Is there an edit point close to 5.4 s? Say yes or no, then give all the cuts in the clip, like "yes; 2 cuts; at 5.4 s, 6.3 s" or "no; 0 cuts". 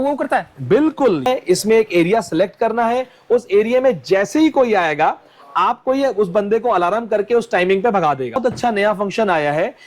no; 2 cuts; at 1.3 s, 8.4 s